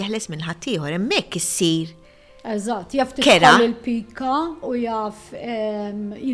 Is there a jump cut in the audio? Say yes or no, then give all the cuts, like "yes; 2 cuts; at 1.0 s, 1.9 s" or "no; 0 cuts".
no; 0 cuts